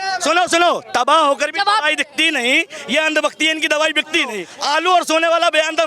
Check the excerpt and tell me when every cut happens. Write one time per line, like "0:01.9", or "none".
0:04.4